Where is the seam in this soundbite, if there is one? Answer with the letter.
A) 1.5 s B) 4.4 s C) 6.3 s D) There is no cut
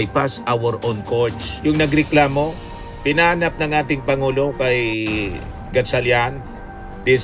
A